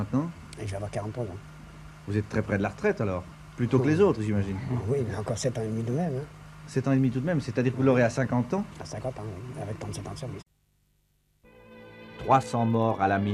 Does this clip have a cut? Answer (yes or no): no